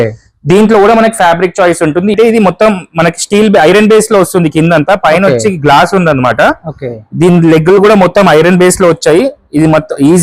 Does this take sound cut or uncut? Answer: cut